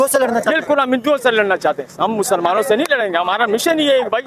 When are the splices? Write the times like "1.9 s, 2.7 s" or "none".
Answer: none

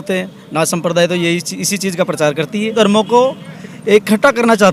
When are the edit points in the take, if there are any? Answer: 2.7 s

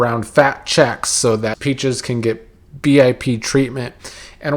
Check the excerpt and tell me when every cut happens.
1.6 s

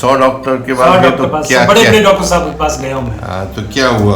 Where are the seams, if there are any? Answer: none

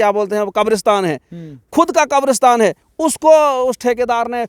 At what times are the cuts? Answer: none

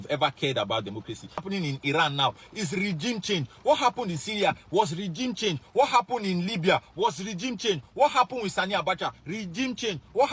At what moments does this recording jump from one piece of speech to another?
1.4 s

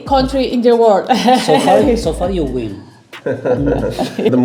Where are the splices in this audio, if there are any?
none

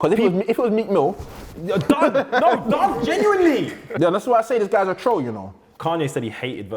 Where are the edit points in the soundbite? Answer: 3.8 s, 5.6 s

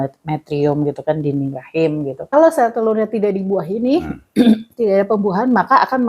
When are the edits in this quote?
2.3 s

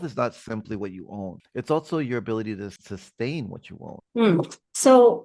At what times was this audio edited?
none

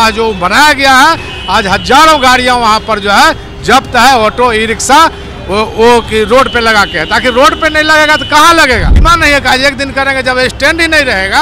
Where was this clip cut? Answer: 9.0 s

